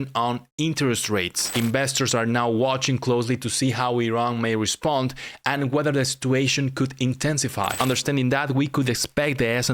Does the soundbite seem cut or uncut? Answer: cut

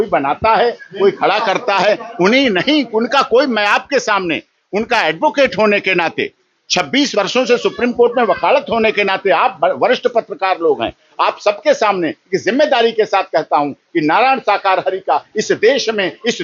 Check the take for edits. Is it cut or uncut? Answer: uncut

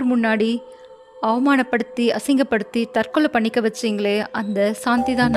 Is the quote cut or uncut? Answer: uncut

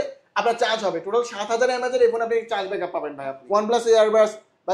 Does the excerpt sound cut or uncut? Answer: cut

